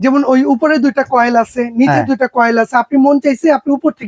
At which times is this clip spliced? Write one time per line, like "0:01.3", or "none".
none